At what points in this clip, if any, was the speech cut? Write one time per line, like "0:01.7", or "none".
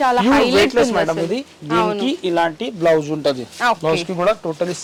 none